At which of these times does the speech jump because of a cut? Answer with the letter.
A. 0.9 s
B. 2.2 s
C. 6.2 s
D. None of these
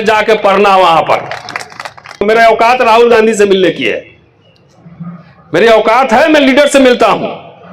B